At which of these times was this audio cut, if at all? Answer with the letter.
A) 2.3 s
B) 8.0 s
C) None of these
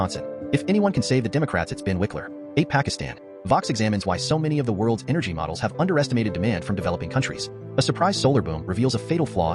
A